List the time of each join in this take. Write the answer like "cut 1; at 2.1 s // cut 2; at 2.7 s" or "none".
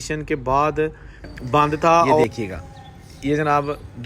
cut 1; at 2.2 s